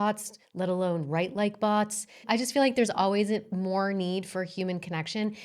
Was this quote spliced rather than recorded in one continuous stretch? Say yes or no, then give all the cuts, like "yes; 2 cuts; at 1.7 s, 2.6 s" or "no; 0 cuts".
yes; 1 cut; at 2.2 s